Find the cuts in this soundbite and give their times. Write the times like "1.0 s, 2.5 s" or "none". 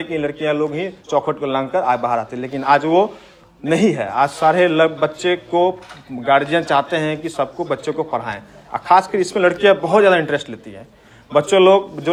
none

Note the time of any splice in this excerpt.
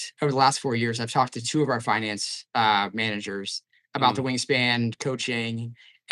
none

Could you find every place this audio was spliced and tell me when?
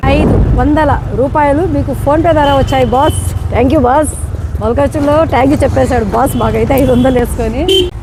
none

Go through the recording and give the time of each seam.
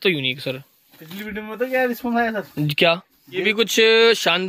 3.4 s

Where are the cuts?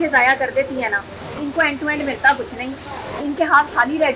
none

